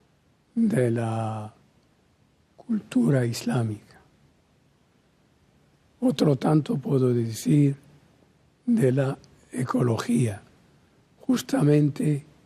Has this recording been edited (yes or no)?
yes